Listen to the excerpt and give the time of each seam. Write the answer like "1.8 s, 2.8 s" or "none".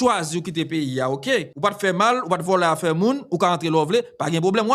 1.5 s